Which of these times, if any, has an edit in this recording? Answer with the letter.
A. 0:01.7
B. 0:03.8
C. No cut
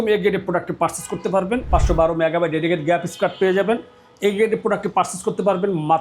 A